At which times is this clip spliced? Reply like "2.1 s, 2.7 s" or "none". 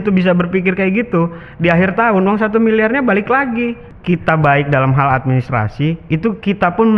3.9 s